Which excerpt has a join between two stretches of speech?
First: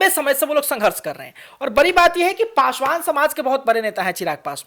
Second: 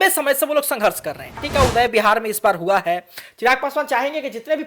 second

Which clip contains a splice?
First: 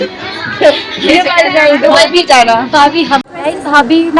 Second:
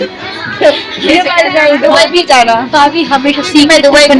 first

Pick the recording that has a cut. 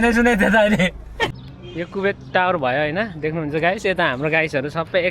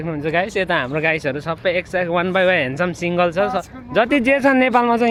first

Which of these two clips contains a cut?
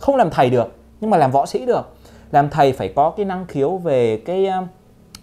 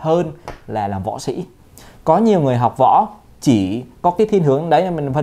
second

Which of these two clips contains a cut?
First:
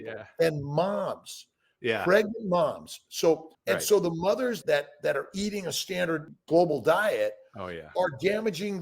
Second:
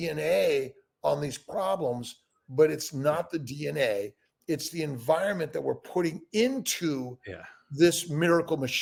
first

